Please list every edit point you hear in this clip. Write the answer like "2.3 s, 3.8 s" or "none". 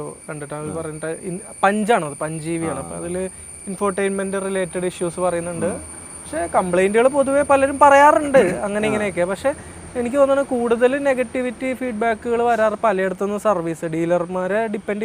none